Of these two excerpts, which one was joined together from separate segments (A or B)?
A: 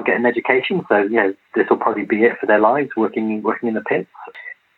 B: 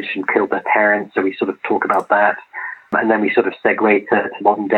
B